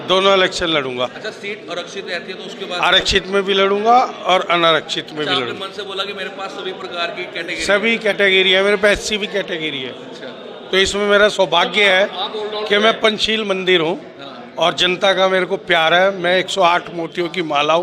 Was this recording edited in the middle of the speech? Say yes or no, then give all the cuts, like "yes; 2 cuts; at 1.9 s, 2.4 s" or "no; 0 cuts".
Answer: no; 0 cuts